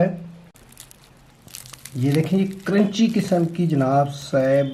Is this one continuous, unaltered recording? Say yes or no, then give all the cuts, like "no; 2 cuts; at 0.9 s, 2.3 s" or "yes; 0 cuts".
yes; 0 cuts